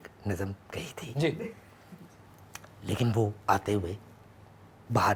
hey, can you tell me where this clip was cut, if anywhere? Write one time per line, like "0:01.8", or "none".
none